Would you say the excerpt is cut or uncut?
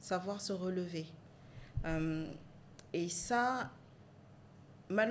uncut